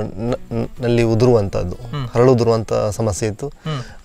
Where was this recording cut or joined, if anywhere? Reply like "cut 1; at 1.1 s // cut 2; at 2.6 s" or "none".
none